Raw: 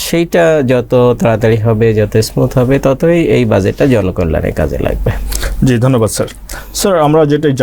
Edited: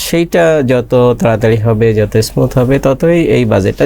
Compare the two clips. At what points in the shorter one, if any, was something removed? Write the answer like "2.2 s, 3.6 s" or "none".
none